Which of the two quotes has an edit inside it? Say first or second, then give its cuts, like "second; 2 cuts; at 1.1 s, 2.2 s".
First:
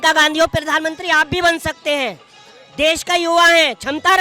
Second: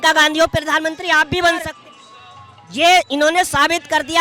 second; 1 cut; at 1.7 s